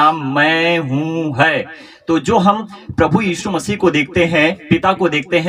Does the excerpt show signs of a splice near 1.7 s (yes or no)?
no